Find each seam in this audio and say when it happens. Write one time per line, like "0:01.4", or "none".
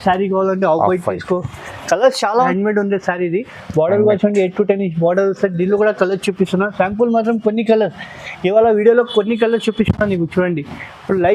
0:02.5

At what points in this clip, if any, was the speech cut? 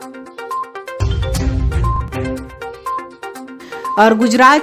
0:01.0

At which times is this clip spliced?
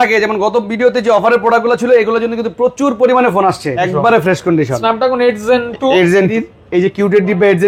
0:03.8
0:06.3

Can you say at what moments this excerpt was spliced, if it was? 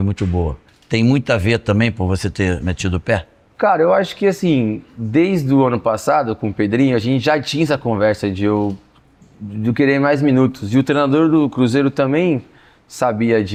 none

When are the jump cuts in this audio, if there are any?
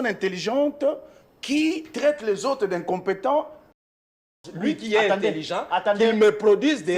0:04.3

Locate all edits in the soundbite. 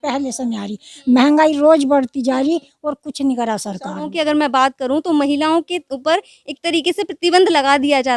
0:04.1

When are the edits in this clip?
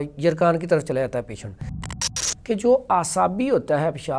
0:01.9

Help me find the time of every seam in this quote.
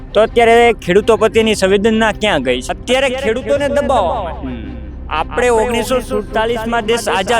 0:02.6

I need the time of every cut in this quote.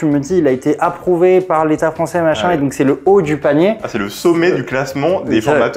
none

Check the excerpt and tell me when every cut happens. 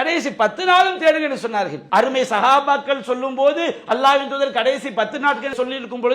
0:01.8

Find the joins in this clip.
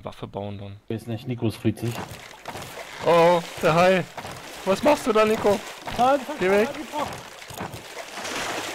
0:02.0

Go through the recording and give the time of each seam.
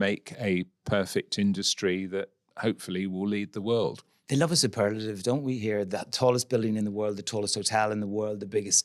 0:04.1

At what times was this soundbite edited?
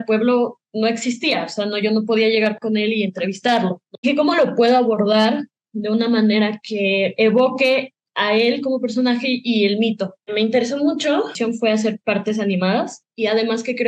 0:04.1

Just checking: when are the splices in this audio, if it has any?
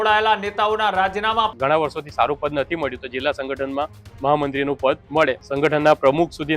0:01.5
0:05.4

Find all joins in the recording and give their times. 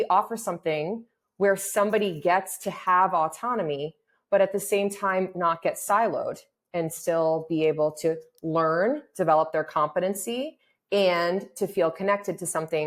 none

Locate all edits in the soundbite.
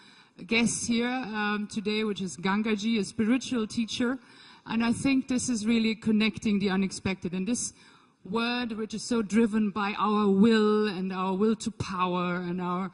0:11.4

